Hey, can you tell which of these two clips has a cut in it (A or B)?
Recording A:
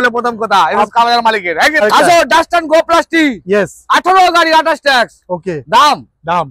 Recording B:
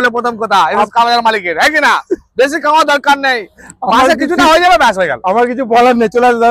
A